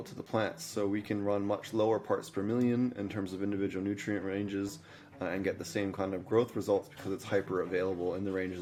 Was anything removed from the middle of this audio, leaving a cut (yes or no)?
no